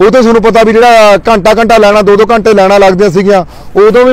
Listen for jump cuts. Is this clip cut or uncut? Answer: uncut